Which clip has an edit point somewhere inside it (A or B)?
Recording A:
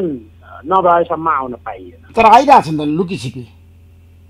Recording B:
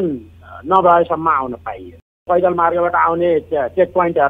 B